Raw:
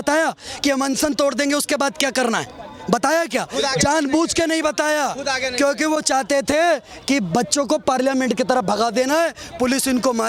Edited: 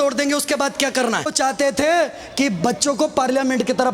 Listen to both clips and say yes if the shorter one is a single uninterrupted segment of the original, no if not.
no